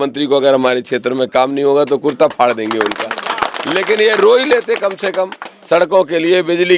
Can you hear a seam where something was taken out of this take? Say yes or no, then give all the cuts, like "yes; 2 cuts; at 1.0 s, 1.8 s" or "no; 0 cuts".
no; 0 cuts